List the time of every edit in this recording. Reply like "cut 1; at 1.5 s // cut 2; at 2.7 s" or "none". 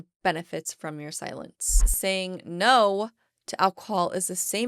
cut 1; at 1.9 s